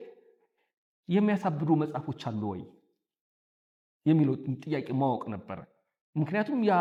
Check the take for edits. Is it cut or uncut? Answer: uncut